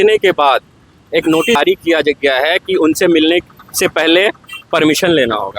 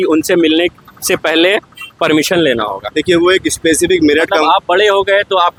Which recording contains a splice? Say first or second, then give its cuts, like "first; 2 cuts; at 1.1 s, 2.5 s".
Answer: first; 1 cut; at 1.6 s